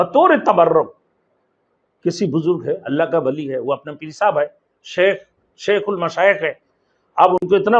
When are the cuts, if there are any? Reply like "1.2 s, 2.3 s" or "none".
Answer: none